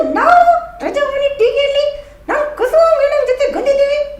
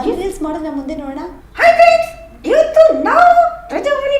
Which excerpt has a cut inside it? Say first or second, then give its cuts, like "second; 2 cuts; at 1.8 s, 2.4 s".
second; 1 cut; at 1.3 s